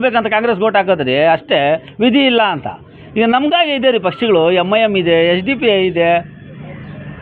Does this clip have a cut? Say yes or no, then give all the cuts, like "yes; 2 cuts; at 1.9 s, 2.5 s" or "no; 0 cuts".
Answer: no; 0 cuts